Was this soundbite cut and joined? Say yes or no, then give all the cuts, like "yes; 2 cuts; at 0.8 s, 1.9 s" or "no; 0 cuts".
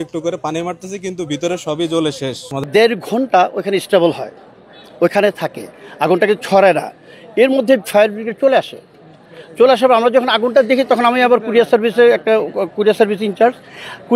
yes; 1 cut; at 2.7 s